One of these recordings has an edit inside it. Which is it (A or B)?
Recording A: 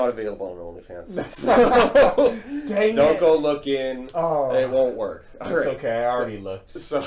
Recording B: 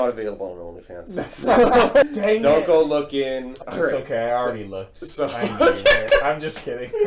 B